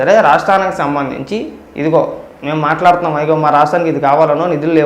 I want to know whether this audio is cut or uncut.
cut